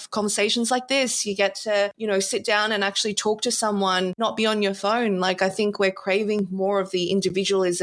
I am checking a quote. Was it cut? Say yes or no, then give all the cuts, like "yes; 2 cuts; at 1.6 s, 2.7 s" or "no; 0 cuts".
yes; 2 cuts; at 2.0 s, 4.2 s